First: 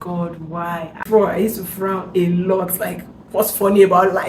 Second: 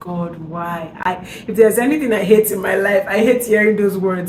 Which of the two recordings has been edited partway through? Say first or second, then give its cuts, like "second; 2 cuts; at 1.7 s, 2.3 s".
first; 1 cut; at 1.0 s